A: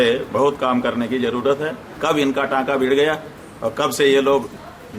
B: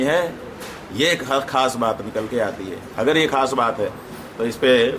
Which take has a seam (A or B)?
A